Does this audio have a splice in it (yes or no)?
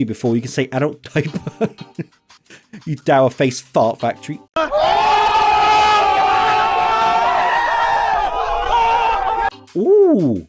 no